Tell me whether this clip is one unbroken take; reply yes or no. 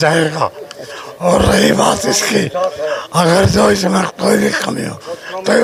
yes